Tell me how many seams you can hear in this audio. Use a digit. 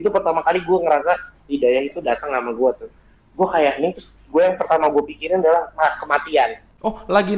0